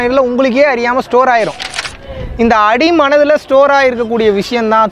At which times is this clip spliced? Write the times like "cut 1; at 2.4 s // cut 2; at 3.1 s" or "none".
cut 1; at 1.8 s